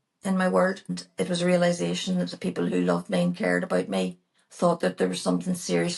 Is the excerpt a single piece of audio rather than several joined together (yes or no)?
no